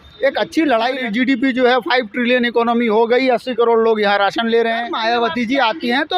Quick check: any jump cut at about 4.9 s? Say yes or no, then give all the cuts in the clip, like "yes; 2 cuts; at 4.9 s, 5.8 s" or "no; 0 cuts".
yes; 2 cuts; at 1.0 s, 4.9 s